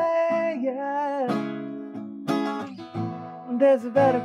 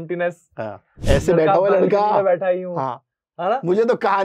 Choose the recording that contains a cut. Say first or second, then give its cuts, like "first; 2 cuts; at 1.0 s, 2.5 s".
second; 1 cut; at 1.0 s